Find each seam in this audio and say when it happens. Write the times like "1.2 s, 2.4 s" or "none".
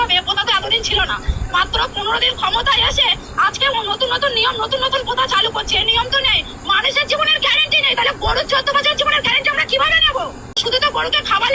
10.6 s